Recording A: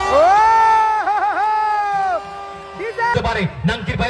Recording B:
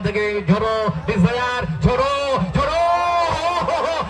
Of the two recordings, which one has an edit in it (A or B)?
A